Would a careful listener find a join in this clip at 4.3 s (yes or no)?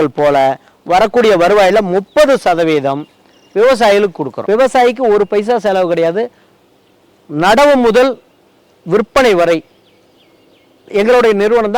yes